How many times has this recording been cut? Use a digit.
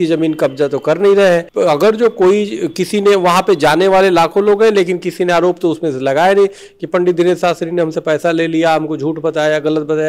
1